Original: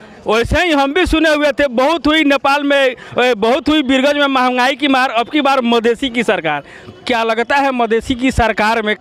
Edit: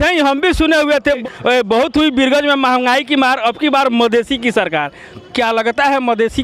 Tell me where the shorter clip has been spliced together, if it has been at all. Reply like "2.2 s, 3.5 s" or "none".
1.2 s